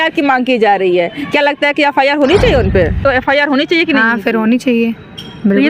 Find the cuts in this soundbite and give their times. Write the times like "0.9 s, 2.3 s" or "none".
3.0 s